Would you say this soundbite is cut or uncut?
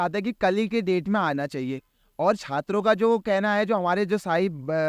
uncut